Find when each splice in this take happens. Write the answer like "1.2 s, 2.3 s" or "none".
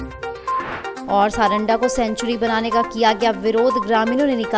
0.9 s